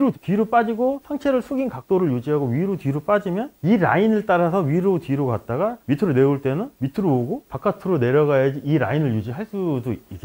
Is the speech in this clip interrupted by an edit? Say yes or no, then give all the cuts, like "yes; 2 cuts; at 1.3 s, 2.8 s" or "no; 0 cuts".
no; 0 cuts